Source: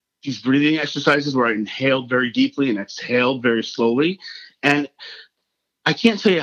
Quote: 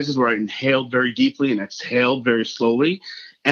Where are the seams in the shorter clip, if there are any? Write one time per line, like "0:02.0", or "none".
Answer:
none